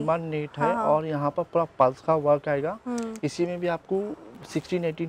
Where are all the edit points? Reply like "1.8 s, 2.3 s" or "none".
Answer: none